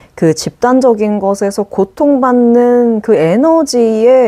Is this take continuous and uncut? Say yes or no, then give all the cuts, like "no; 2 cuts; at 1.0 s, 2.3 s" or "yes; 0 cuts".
yes; 0 cuts